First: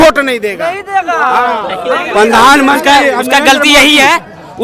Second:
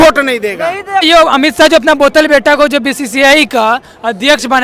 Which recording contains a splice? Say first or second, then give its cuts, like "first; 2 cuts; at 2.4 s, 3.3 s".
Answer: second; 1 cut; at 1.0 s